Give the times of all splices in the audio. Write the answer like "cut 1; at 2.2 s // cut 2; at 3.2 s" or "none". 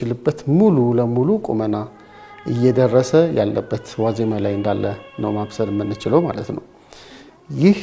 none